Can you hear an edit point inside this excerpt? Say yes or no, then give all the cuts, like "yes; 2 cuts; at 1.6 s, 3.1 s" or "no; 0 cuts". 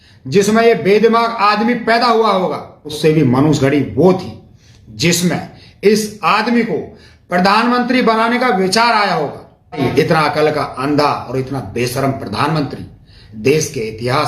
yes; 2 cuts; at 2.9 s, 9.8 s